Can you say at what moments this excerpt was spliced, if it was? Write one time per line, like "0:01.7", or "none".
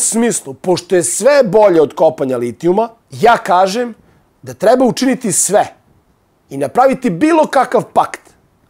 0:03.0